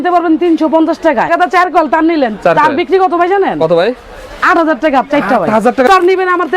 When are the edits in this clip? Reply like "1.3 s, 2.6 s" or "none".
1.3 s, 5.9 s